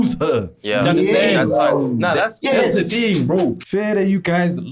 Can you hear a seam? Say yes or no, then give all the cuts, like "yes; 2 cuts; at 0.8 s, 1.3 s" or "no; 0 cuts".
yes; 1 cut; at 3.6 s